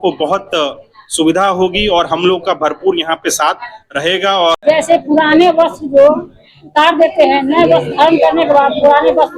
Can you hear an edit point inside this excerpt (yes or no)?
yes